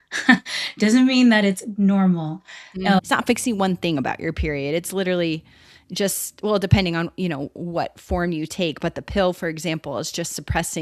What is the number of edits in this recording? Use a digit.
1